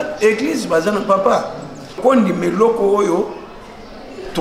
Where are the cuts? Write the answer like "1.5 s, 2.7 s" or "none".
2.0 s